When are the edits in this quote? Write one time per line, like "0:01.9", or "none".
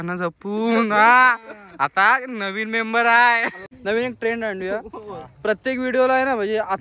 0:03.7

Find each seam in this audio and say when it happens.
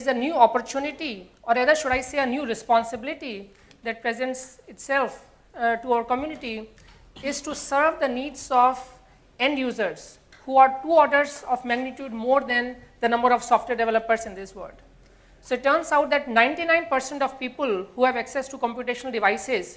0:13.3

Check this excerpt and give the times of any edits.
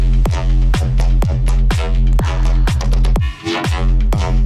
none

